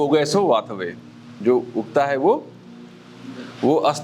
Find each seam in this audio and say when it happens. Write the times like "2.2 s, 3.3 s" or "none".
none